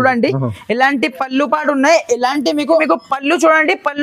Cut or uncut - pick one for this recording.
cut